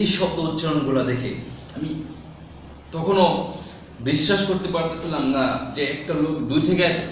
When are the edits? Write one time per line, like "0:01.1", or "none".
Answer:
none